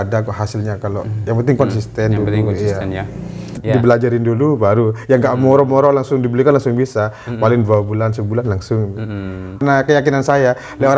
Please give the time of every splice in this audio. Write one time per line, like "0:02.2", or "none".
0:03.6
0:09.6